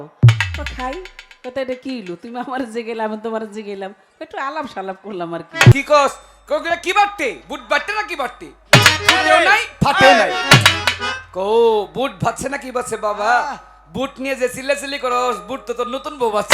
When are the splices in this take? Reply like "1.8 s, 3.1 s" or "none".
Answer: 5.7 s